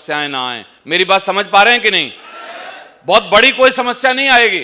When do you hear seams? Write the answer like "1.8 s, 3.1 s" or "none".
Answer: none